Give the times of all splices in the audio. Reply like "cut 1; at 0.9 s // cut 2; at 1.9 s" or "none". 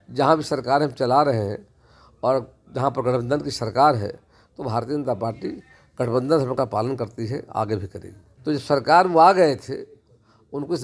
cut 1; at 8.3 s